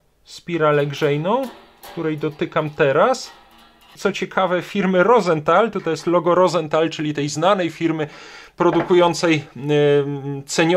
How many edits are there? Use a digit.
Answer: 1